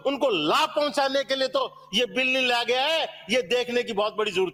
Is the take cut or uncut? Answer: uncut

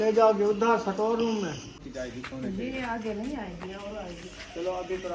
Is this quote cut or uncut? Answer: cut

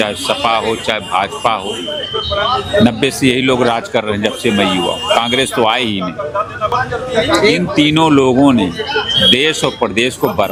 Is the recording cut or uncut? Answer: uncut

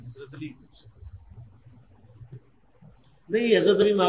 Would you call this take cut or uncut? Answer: uncut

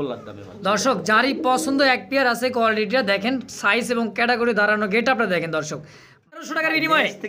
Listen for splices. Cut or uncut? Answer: cut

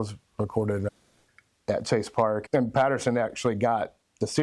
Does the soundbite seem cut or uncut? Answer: cut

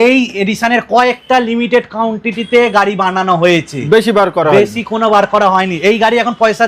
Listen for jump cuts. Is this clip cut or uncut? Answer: uncut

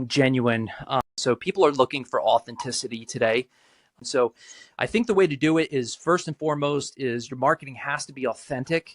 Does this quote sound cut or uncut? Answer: cut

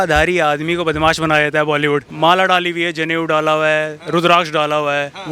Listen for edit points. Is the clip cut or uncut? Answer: cut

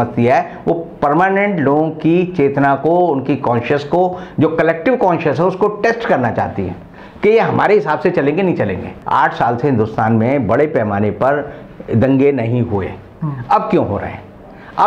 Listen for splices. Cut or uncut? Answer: cut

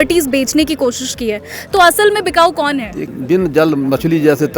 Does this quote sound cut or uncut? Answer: cut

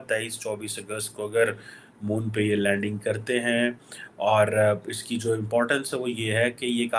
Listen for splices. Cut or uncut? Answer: uncut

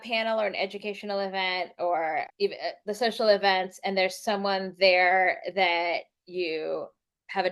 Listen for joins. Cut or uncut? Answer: uncut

